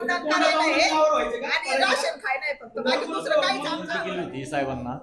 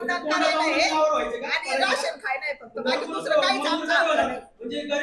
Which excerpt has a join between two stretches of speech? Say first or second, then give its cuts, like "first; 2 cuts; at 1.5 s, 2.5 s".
first; 1 cut; at 3.9 s